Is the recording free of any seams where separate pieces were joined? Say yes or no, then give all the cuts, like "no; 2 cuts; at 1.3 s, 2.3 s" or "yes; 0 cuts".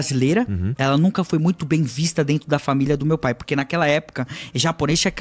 yes; 0 cuts